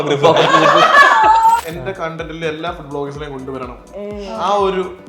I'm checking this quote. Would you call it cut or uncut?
cut